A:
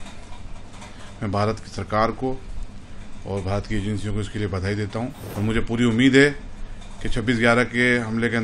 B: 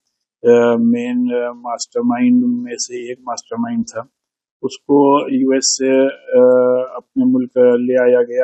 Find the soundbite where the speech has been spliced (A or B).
A